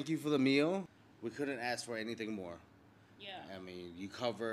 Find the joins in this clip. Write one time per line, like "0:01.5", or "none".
0:01.0